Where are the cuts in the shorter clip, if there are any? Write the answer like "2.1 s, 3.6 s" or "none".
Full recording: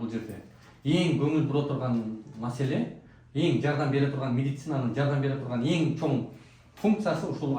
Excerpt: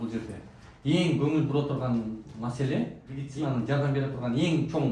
3.2 s